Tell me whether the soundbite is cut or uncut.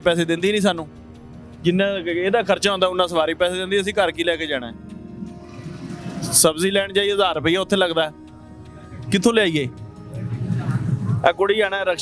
uncut